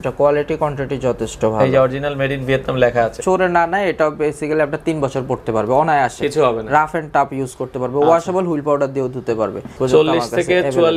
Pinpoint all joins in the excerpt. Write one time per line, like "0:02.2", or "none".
0:03.2
0:09.7